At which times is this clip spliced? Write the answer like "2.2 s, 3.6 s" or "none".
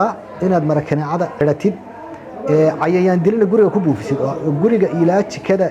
1.3 s